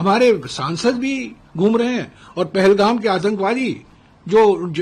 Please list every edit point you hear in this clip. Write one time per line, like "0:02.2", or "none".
none

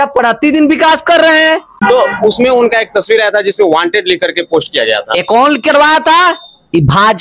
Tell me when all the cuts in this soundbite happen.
0:01.7

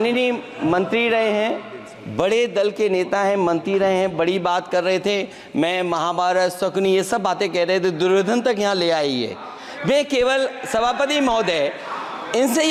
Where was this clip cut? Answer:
none

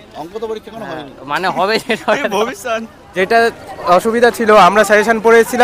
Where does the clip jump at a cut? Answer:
0:03.1

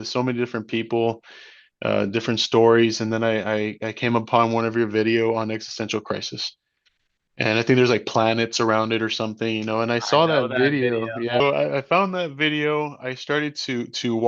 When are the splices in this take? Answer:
none

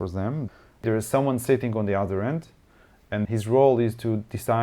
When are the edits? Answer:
0:00.8
0:03.3

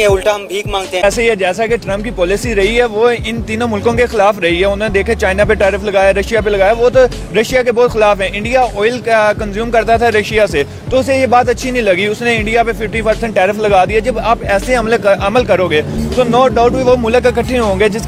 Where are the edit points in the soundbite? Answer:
none

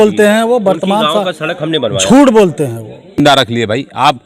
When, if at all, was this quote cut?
0:03.2

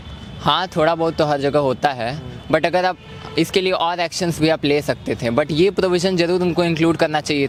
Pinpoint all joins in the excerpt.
none

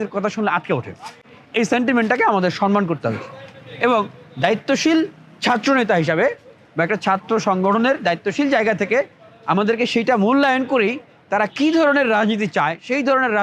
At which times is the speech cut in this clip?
none

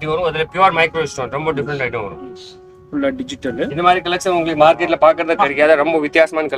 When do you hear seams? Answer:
none

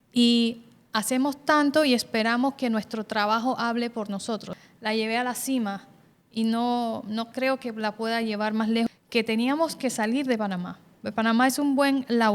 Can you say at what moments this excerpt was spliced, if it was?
0:04.5
0:08.9

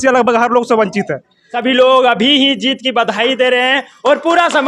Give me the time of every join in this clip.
0:01.4

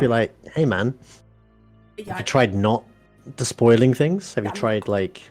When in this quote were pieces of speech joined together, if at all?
none

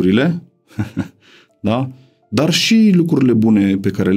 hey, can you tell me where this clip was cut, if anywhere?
none

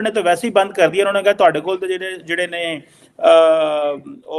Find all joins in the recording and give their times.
none

